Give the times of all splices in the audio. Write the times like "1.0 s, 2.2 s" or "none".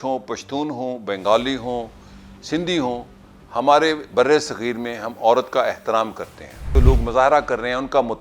6.7 s